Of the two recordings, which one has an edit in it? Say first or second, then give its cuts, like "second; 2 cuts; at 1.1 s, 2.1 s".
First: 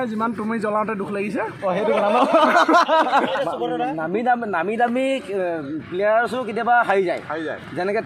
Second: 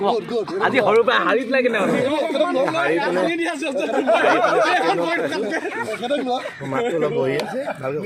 first; 1 cut; at 3.3 s